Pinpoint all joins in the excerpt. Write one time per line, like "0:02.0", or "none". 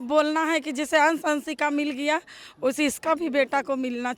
none